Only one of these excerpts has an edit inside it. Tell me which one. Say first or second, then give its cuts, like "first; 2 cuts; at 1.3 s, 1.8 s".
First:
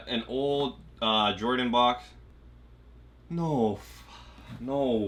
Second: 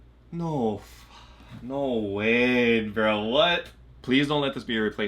second; 1 cut; at 4.0 s